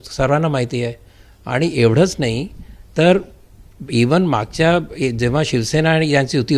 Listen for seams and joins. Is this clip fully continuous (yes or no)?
yes